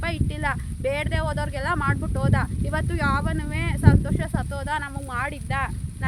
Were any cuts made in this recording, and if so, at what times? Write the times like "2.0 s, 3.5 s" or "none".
none